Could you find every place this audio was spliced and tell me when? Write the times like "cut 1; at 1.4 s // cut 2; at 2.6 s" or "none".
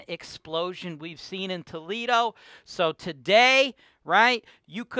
none